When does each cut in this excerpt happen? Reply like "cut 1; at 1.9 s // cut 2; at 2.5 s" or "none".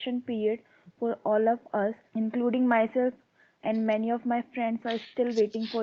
cut 1; at 2.0 s